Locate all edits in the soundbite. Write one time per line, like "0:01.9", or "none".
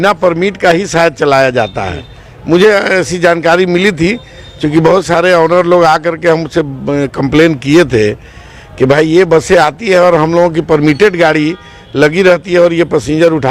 none